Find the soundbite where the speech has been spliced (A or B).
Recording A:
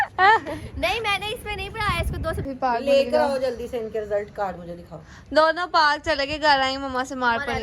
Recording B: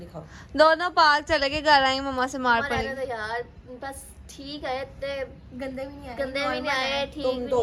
A